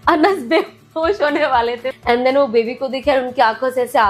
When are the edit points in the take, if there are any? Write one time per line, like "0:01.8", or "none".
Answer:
0:01.9